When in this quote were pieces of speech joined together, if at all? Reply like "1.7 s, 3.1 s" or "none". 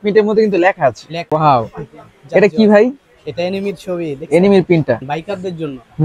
1.3 s, 5.0 s